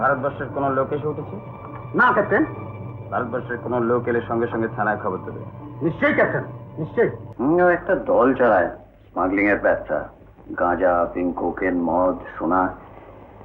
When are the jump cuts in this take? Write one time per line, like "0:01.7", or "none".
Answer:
0:07.2